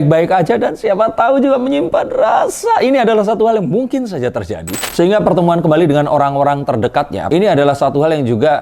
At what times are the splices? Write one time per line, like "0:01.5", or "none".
0:04.9
0:07.2